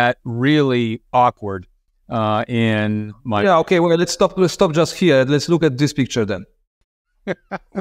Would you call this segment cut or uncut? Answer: uncut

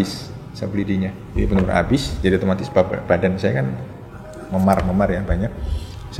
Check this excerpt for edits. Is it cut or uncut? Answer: cut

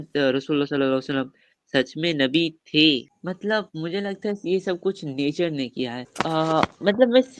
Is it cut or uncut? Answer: cut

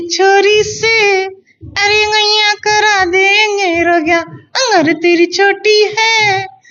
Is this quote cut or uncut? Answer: uncut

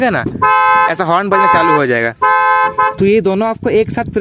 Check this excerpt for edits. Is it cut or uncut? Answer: cut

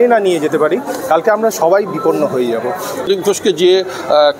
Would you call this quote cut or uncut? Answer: cut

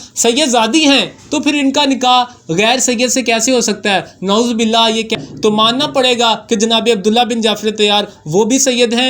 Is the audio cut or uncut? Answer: cut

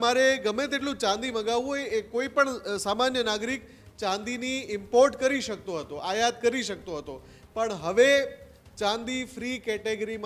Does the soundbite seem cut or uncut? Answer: uncut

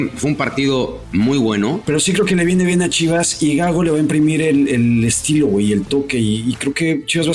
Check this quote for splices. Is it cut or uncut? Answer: cut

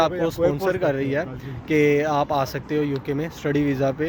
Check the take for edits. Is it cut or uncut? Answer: uncut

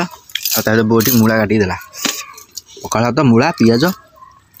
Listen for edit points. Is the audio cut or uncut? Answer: uncut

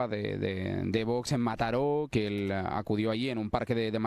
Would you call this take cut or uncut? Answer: cut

